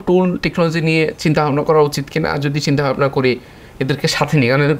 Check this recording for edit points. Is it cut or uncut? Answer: uncut